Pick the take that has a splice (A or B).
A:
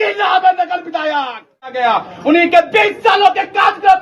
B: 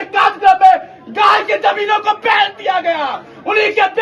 A